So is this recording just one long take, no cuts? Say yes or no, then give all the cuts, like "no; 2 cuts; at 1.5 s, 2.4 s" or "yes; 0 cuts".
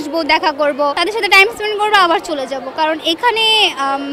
no; 1 cut; at 1.0 s